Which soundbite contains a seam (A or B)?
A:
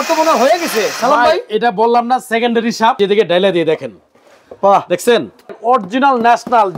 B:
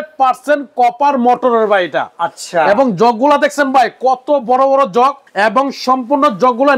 A